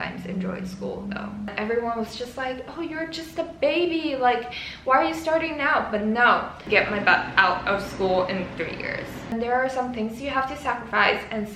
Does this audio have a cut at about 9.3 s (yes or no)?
yes